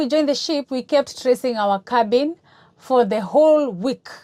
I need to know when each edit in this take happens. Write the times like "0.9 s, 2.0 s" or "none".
none